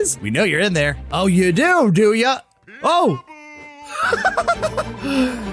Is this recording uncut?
yes; 0 cuts

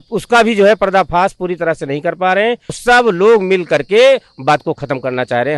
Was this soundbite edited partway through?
yes; 1 cut; at 2.8 s

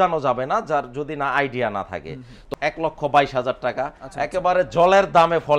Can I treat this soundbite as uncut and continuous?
no; 1 cut; at 2.3 s

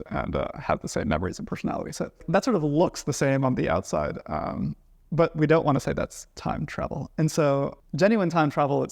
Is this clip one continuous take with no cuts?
no; 2 cuts; at 2.2 s, 7.8 s

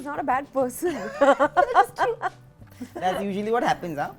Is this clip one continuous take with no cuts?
yes; 0 cuts

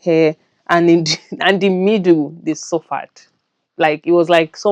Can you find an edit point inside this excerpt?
no; 0 cuts

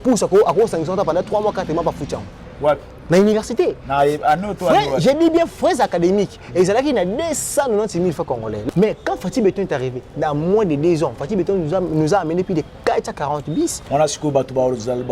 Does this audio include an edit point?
yes; 1 cut; at 8.6 s

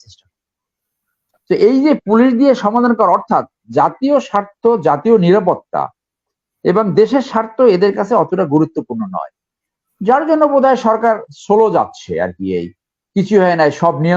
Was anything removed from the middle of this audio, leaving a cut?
no; 0 cuts

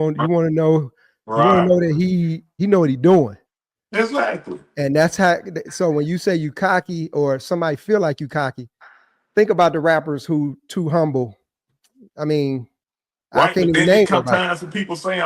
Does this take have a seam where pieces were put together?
yes; 1 cut; at 2.4 s

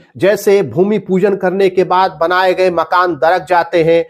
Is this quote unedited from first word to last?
yes; 0 cuts

